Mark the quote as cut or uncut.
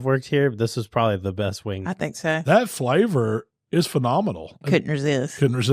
cut